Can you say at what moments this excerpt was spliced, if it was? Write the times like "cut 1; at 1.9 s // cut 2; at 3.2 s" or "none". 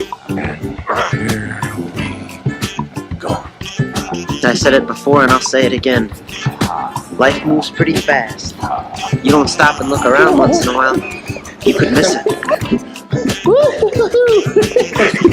cut 1; at 1.5 s